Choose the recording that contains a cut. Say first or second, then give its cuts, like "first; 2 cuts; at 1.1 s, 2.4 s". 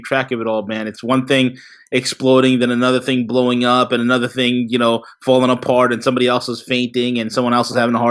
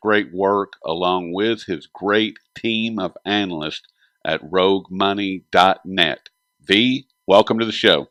first; 1 cut; at 1.0 s